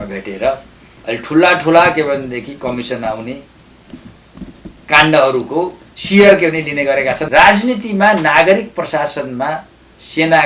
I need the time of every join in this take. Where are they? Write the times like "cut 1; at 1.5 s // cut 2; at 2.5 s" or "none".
cut 1; at 7.2 s